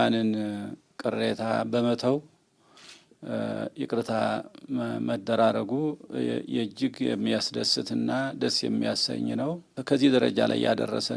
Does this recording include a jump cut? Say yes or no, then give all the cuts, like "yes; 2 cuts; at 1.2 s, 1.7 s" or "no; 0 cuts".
no; 0 cuts